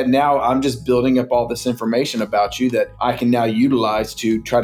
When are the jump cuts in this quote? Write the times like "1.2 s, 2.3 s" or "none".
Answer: 2.9 s